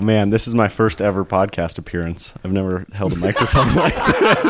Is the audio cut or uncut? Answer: uncut